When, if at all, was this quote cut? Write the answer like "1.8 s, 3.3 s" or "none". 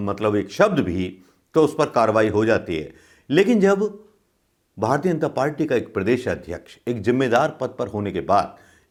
none